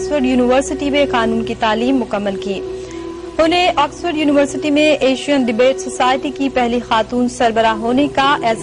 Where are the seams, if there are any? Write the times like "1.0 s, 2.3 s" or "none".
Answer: 7.3 s